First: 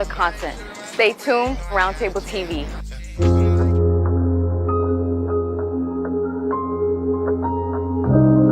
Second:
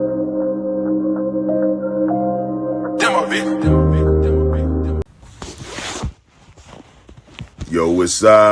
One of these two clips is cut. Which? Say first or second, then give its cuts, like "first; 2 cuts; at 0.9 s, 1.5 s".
second; 1 cut; at 5.0 s